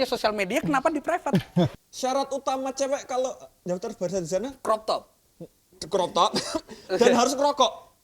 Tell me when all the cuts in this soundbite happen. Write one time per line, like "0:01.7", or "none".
0:01.7